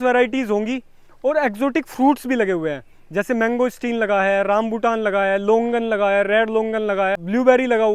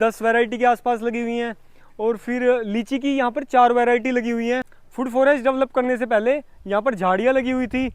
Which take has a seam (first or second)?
second